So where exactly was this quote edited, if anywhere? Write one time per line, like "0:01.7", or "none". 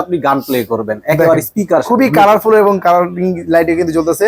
none